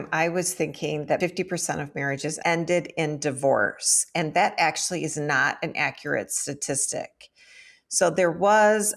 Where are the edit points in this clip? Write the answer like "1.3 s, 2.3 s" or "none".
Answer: 1.2 s, 2.4 s